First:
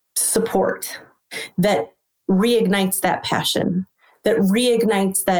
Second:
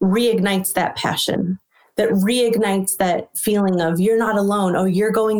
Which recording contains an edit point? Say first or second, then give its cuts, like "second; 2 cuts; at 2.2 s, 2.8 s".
first; 1 cut; at 1.3 s